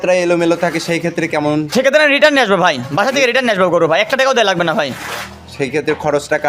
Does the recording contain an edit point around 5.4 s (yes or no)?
no